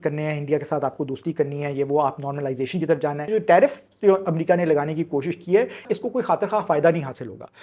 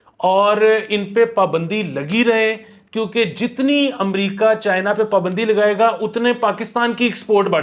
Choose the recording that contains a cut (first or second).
first